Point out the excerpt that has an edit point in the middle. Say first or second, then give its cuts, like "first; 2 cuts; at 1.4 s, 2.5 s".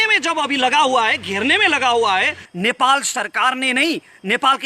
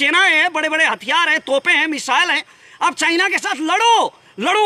first; 1 cut; at 2.4 s